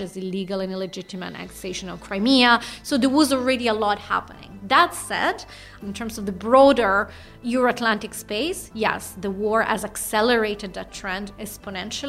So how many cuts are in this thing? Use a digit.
2